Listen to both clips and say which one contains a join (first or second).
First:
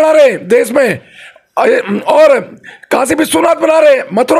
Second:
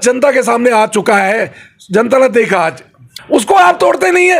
second